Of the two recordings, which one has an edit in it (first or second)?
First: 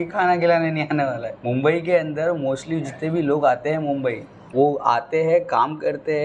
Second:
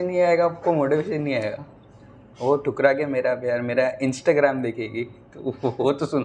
first